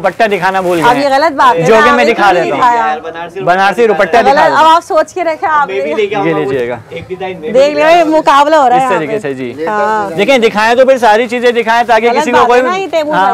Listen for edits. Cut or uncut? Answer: uncut